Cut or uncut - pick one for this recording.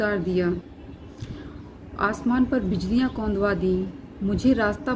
uncut